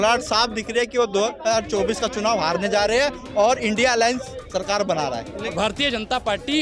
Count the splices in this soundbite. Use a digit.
1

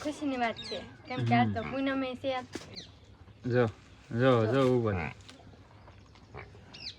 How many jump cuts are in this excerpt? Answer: 1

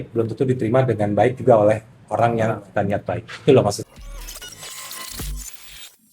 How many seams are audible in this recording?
1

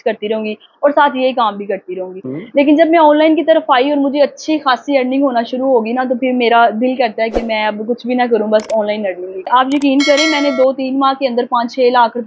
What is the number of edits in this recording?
2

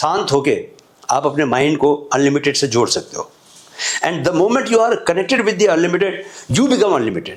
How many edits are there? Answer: 0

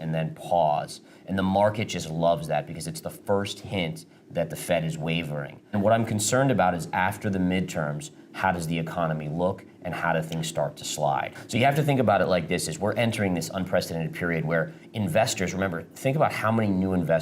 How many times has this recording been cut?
2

